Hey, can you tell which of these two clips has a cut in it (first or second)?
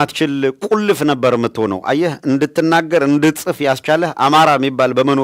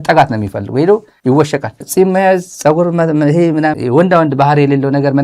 second